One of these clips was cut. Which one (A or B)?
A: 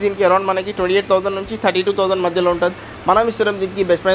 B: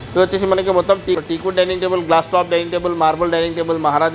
B